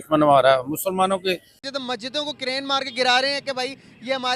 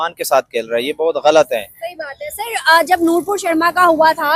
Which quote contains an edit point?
first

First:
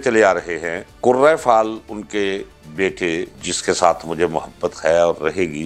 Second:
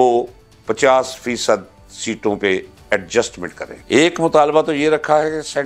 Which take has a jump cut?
second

